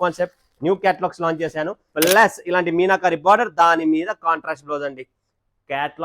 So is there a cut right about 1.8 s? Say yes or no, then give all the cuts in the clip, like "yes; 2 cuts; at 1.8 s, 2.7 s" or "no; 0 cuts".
yes; 1 cut; at 1.8 s